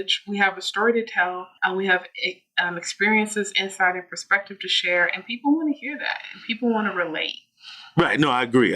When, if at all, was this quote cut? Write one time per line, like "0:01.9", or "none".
0:01.5